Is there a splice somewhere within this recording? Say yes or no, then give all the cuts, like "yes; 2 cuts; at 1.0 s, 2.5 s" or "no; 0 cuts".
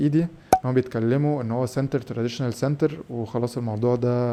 no; 0 cuts